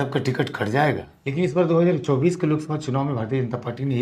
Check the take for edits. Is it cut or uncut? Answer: cut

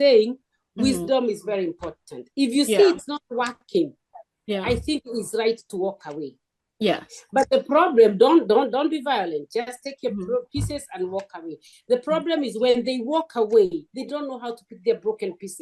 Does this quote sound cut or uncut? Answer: uncut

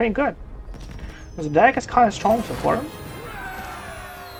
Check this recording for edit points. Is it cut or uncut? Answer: uncut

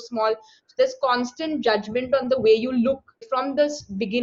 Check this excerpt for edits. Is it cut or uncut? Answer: cut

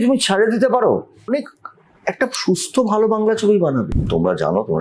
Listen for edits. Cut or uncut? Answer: cut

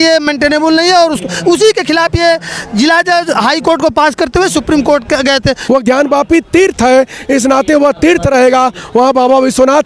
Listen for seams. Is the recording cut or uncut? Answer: cut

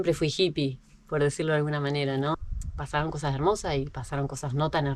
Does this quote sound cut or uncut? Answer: cut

